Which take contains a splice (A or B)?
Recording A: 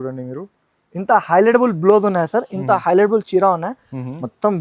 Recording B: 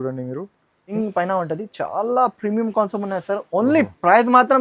B